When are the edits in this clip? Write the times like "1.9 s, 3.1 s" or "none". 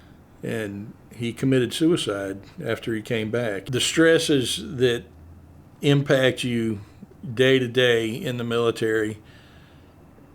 3.6 s